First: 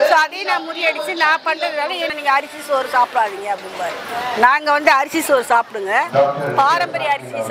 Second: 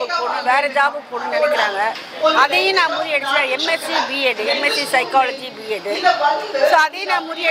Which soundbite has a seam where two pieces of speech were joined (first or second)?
first